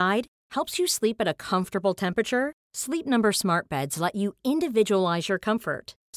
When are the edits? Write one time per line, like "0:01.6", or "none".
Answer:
none